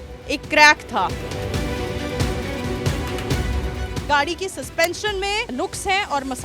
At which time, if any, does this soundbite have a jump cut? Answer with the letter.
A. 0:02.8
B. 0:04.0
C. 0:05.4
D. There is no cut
B